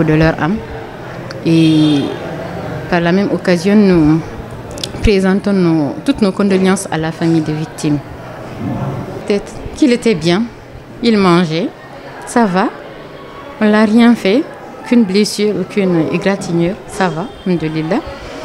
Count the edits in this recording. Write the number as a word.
one